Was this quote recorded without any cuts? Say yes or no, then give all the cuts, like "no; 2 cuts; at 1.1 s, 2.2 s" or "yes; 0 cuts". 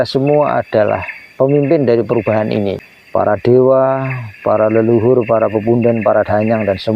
no; 1 cut; at 2.9 s